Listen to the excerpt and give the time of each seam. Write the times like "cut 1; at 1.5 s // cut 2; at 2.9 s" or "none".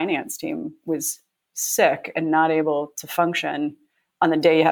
none